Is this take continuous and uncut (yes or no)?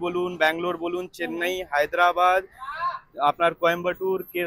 yes